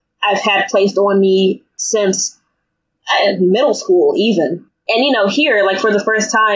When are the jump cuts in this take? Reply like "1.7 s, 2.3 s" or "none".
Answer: 1.7 s, 4.7 s